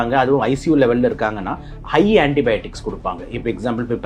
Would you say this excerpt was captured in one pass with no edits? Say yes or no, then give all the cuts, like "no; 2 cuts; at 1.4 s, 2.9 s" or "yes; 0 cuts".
yes; 0 cuts